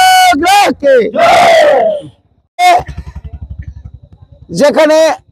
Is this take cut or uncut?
uncut